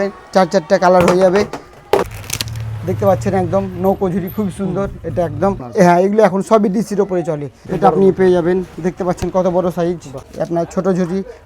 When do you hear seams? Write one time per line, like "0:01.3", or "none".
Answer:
0:02.0
0:05.6
0:07.5
0:10.2